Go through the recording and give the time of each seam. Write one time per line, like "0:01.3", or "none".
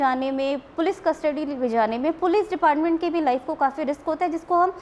none